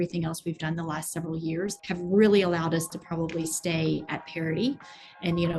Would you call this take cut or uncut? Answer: cut